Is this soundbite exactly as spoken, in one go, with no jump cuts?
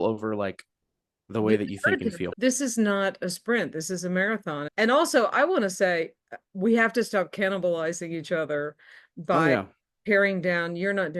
no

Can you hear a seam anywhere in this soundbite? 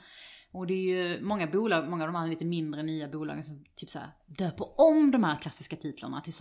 no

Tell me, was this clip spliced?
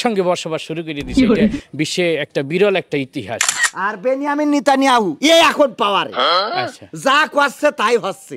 yes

